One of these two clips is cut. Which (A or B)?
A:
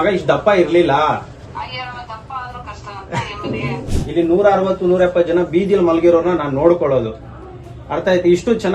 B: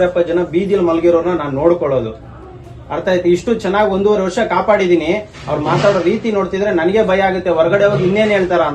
A